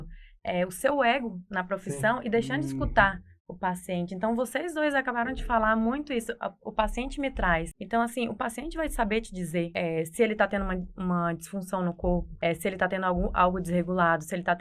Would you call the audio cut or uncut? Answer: cut